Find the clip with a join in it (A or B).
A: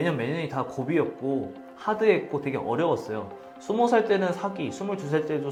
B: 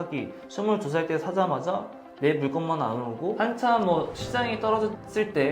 B